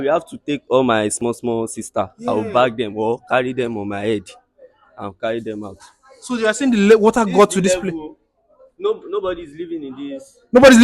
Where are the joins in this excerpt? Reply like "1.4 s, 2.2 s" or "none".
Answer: none